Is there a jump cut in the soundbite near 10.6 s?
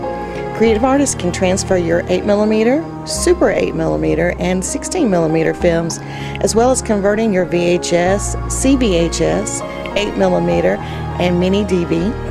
no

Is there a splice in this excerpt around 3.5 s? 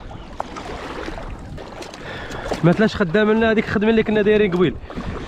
no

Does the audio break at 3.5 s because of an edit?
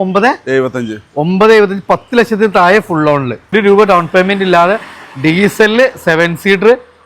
yes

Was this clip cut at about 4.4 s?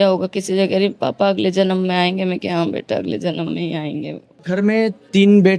yes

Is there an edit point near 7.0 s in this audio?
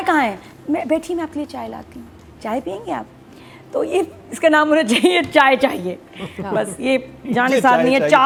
no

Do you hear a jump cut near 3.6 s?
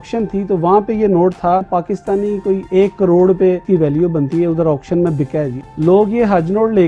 yes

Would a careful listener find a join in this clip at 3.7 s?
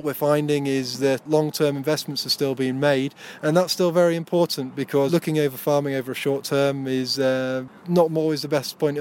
no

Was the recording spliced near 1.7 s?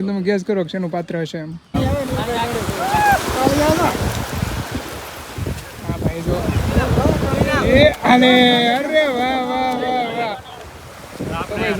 yes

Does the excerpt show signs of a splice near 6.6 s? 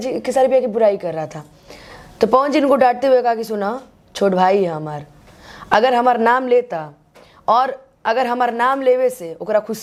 no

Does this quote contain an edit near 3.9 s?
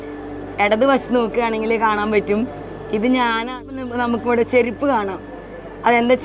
yes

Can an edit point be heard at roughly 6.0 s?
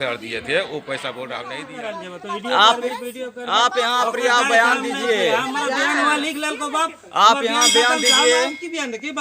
no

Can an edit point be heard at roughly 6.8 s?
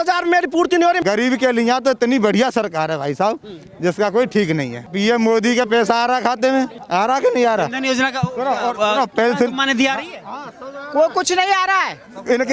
yes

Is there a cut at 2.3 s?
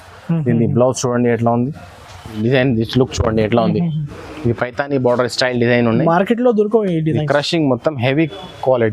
yes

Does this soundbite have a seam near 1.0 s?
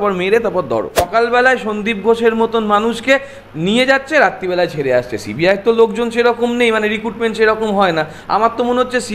yes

